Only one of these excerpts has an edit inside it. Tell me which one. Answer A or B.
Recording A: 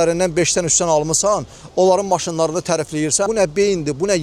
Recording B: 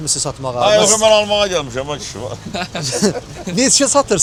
A